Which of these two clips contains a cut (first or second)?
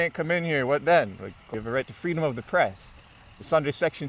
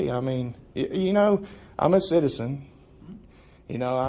first